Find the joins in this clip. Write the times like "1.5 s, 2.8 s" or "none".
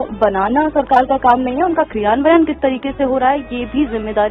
none